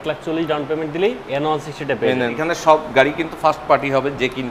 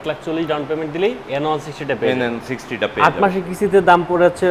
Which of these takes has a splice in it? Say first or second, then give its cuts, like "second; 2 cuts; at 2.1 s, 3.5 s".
first; 1 cut; at 2.4 s